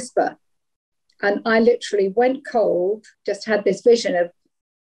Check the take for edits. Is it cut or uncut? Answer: cut